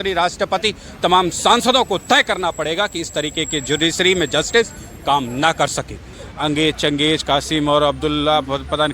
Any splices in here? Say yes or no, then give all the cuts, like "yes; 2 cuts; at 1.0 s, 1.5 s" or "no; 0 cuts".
yes; 1 cut; at 6.2 s